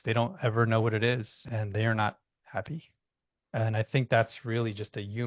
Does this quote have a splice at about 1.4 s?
yes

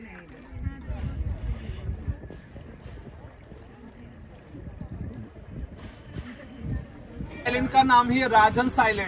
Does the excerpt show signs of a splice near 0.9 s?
yes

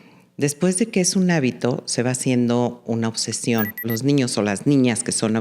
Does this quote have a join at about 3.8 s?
yes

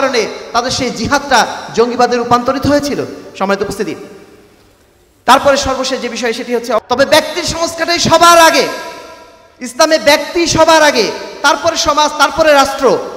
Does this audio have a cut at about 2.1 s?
no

